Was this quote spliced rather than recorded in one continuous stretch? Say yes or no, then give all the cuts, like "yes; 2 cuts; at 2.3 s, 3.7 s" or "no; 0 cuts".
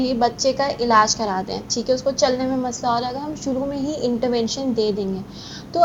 no; 0 cuts